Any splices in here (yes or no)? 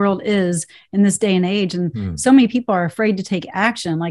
no